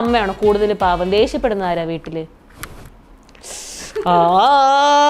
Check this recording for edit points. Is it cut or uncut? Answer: uncut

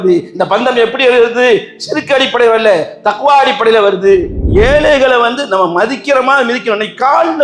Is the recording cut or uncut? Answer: cut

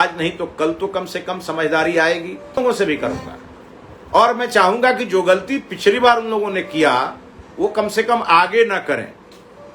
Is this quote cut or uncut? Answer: cut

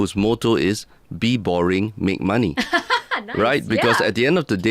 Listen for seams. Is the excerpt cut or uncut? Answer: uncut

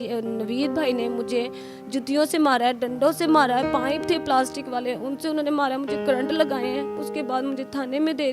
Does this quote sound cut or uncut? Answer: cut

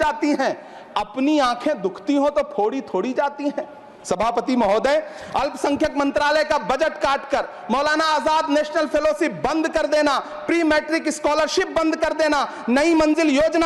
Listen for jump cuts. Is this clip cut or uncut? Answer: uncut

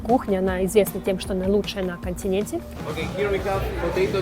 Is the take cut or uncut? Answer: cut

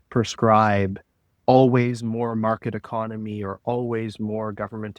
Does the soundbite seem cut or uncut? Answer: uncut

